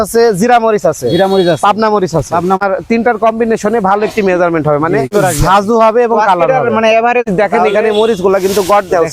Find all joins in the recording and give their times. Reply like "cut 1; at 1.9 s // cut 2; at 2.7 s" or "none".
cut 1; at 2.6 s // cut 2; at 5.1 s // cut 3; at 7.3 s